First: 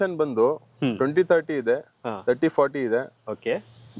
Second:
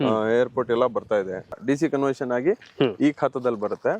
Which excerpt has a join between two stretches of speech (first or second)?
second